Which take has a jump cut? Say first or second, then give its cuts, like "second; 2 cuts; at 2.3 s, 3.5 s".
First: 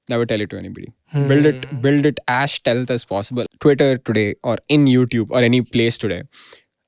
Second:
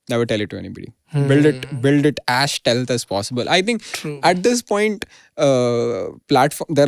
first; 1 cut; at 3.4 s